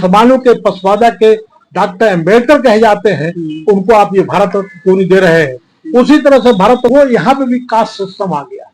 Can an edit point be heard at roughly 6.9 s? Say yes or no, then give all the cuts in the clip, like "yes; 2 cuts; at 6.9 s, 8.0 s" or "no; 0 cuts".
yes; 1 cut; at 6.9 s